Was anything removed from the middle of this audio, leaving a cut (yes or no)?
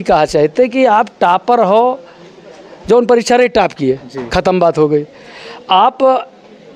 no